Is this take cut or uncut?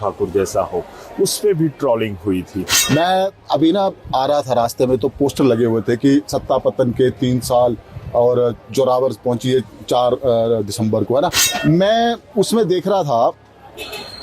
cut